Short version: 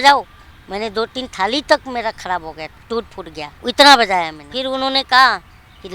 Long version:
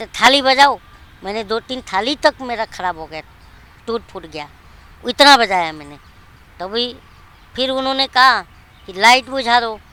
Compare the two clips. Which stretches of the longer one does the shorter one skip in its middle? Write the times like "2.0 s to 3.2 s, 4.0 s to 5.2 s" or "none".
3.3 s to 3.7 s, 4.5 s to 4.9 s, 5.8 s to 7.5 s